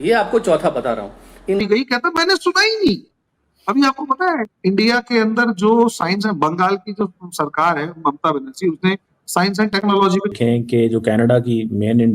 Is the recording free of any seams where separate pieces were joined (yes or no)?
no